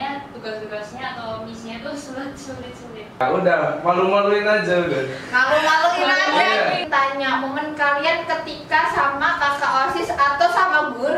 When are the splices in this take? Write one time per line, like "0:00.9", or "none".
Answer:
0:03.2
0:06.8